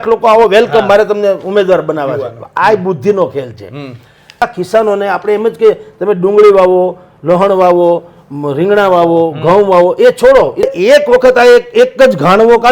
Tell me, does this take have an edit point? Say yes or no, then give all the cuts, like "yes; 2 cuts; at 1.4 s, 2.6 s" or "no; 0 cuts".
yes; 2 cuts; at 4.4 s, 10.7 s